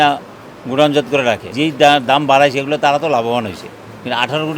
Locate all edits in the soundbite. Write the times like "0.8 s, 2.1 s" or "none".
1.5 s

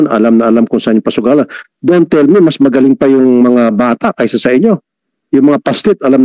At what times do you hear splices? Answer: none

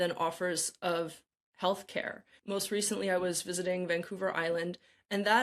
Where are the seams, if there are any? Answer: 2.3 s

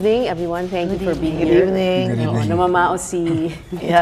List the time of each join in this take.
none

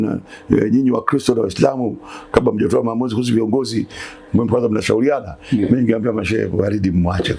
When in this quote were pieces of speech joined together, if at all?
none

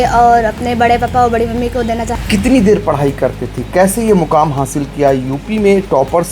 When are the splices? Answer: 2.1 s

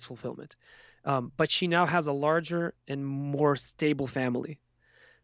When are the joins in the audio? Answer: none

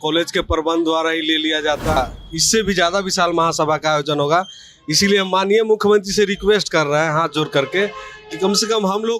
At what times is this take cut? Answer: 2.0 s

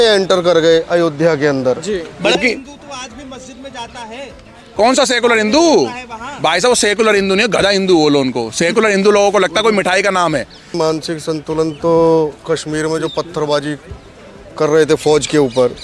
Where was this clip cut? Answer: 2.4 s, 10.7 s

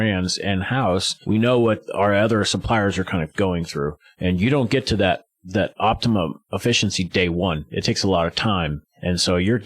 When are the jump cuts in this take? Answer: 1.1 s

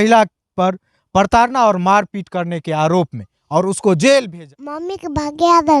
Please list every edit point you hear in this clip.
4.4 s

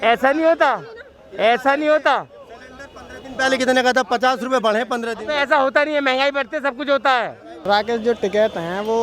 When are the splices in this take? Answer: 7.6 s

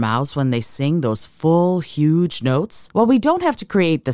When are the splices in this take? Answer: 2.8 s

